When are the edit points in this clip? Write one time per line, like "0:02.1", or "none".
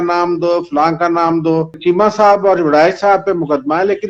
0:01.8

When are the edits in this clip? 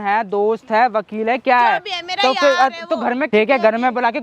0:03.3

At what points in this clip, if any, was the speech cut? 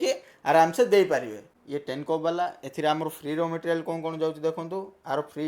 0:01.4

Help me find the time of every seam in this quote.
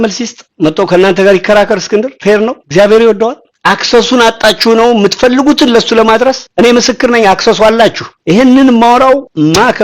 0:08.1

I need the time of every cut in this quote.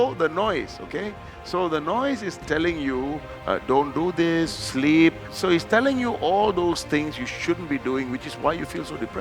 0:05.3

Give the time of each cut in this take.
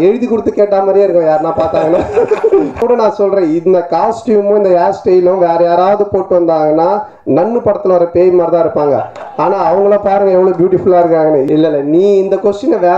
0:02.8
0:11.5

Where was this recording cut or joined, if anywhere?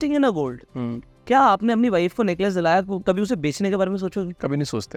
none

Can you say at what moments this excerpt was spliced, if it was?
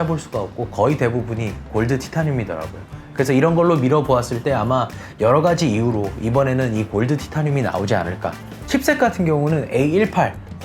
0:08.6

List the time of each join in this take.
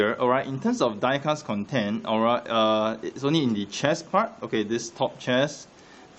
none

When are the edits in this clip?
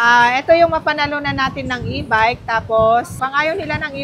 none

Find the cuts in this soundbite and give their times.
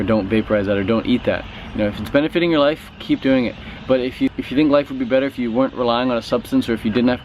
0:04.3

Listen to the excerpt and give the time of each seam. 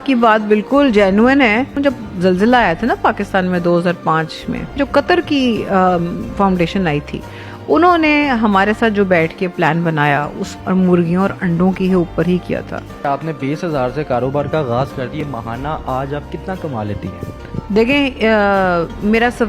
0:01.8
0:04.8
0:10.4
0:13.0
0:15.1

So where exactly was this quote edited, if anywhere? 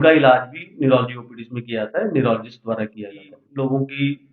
0:03.4

